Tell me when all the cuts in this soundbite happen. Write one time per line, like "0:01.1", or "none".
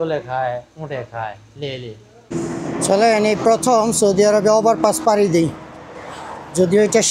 0:02.3

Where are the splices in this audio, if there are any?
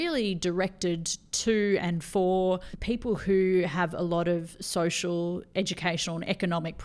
0:02.7

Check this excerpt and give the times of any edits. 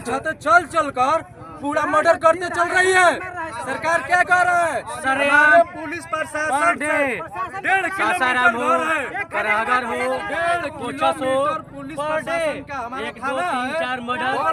none

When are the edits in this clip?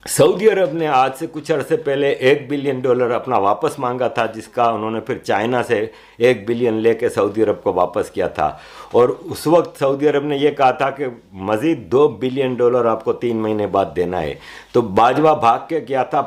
none

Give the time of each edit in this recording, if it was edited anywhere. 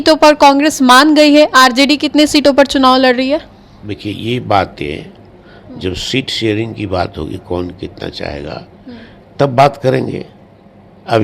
none

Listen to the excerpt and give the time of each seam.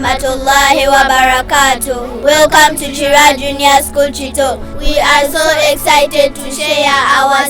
0:04.7

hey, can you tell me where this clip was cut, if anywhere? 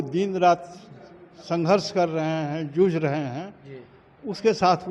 none

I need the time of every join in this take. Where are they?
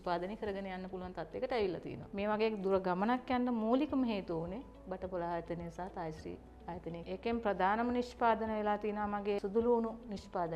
0:02.1
0:07.0

